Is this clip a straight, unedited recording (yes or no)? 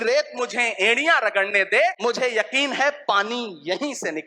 no